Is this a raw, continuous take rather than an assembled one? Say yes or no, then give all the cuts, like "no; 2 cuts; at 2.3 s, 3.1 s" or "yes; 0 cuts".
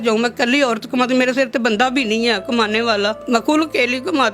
no; 1 cut; at 3.2 s